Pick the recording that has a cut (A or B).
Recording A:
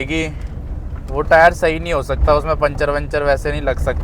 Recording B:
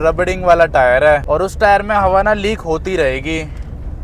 B